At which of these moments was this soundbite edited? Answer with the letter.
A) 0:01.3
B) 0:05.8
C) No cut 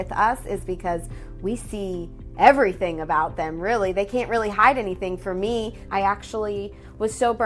B